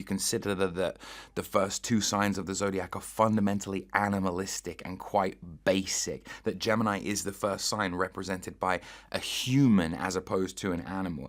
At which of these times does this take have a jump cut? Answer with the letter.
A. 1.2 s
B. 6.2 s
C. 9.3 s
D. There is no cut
D